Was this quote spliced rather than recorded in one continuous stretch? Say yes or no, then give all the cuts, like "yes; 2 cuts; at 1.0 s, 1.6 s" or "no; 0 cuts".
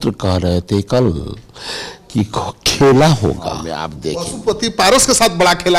yes; 1 cut; at 3.8 s